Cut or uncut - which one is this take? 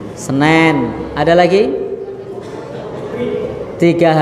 uncut